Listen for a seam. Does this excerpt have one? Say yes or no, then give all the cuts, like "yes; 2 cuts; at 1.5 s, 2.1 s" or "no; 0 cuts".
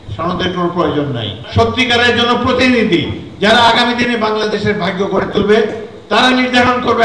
yes; 1 cut; at 1.4 s